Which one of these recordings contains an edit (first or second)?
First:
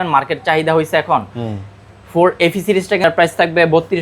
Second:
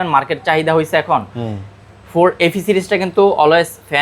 first